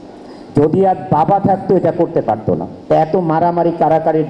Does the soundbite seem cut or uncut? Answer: cut